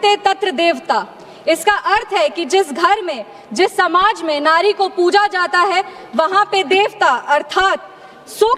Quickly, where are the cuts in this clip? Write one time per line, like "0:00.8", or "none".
none